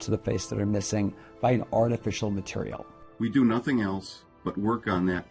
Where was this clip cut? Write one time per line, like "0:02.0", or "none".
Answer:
0:02.9

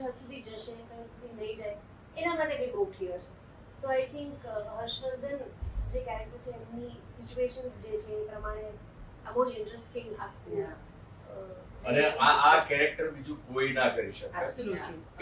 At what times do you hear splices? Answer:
none

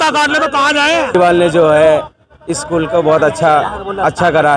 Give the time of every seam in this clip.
0:01.1

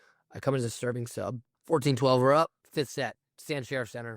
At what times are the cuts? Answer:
0:01.5
0:02.6

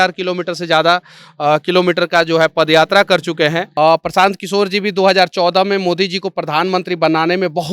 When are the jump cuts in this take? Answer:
0:03.7

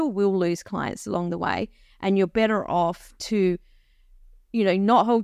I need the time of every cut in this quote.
none

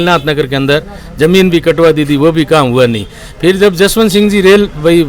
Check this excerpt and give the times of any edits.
none

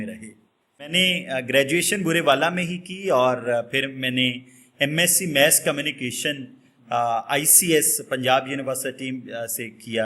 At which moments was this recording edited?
0:00.9

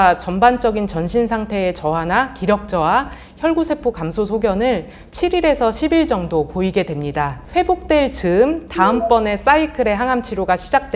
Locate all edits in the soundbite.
none

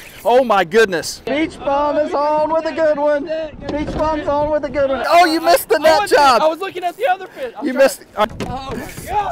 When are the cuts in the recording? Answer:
0:01.3
0:05.0
0:08.2

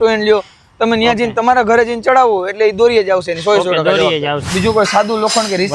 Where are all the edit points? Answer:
0:04.4

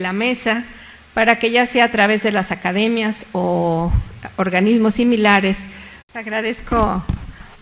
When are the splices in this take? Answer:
none

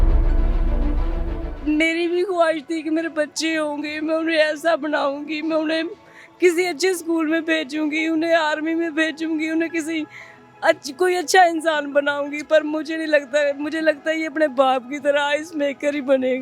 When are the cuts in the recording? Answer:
0:01.4

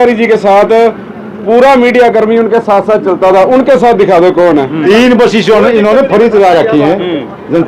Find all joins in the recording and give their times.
0:04.8

